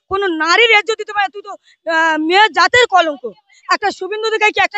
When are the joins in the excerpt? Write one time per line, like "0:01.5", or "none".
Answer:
0:03.5